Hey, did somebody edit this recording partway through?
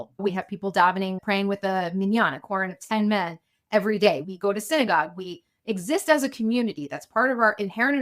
yes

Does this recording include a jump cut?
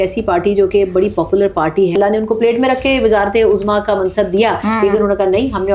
yes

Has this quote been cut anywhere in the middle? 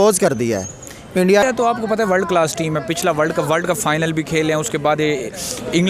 yes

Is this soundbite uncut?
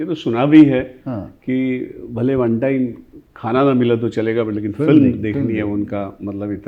yes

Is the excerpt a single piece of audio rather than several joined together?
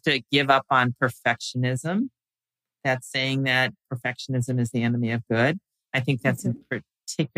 yes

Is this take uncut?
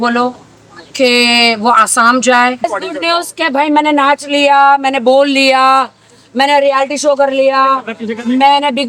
no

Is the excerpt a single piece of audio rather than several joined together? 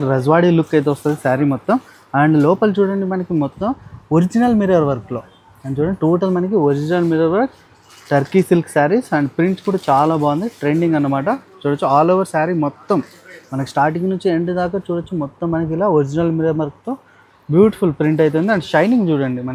yes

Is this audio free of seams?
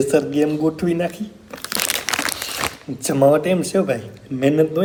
yes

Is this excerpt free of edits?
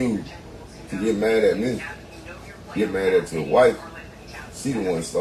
yes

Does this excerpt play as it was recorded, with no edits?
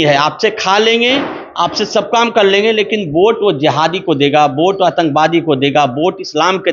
yes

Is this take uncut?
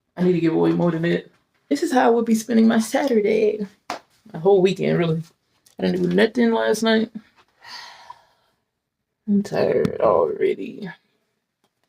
no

